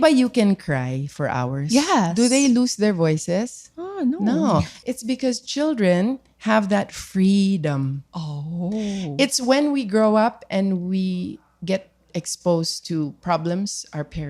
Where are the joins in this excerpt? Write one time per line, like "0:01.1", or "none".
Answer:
0:04.7